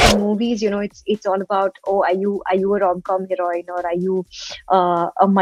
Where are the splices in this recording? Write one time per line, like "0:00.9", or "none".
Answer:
none